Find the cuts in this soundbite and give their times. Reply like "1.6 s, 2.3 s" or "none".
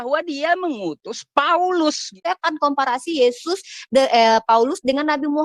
2.2 s